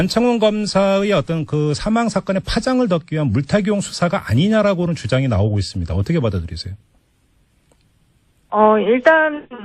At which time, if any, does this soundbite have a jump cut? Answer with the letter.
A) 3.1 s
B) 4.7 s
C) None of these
C